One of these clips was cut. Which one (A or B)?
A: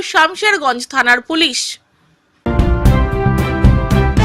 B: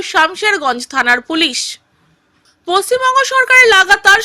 A